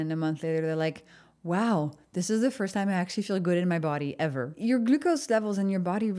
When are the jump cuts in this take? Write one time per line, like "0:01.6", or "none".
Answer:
0:04.5